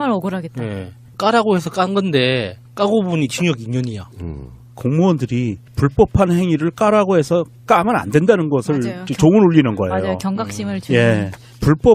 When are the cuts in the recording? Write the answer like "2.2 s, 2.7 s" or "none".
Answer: none